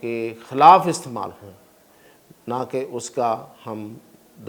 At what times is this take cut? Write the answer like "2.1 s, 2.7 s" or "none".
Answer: none